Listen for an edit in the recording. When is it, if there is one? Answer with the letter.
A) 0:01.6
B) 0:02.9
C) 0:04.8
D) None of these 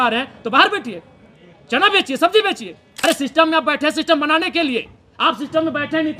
B